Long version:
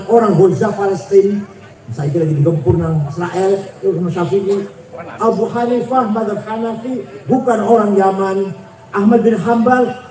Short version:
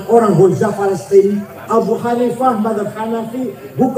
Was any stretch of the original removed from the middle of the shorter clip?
yes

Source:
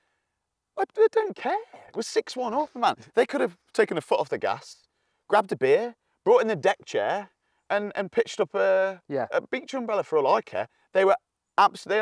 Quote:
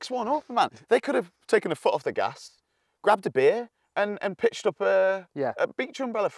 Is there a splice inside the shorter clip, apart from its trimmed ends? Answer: yes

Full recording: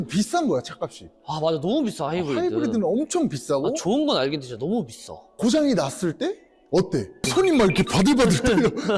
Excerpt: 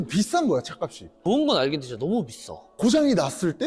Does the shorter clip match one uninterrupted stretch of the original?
no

